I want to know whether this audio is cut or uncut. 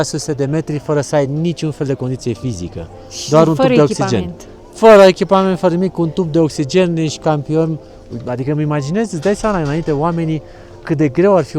uncut